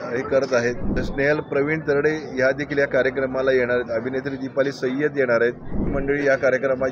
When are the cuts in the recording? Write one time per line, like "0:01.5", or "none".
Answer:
0:01.0
0:05.9